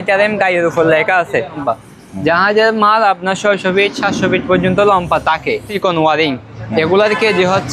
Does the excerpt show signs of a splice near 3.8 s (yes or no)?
no